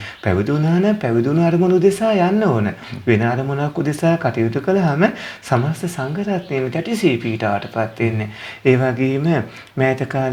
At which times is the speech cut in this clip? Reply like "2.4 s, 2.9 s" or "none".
none